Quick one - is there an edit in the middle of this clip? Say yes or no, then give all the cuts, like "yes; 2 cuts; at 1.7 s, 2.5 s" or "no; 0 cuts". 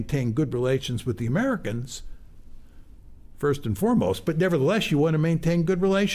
no; 0 cuts